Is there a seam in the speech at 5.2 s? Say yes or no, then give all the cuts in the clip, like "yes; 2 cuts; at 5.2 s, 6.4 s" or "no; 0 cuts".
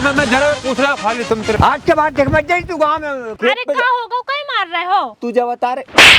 no; 2 cuts; at 1.6 s, 3.3 s